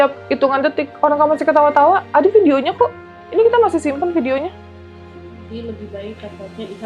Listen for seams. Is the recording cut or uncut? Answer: uncut